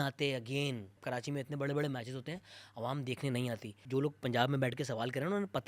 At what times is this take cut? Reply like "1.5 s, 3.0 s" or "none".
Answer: 1.0 s, 3.8 s